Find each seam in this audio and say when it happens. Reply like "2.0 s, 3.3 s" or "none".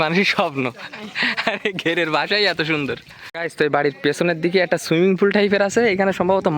3.4 s